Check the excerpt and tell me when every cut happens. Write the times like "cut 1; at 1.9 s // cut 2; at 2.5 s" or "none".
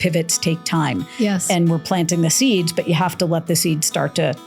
none